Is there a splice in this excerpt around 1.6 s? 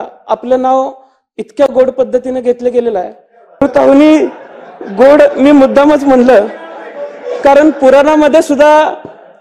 no; 1 cut; at 3.6 s

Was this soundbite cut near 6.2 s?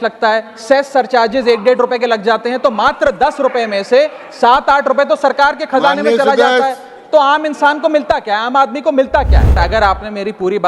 no; 1 cut; at 9.6 s

